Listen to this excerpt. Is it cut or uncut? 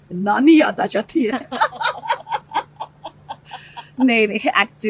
uncut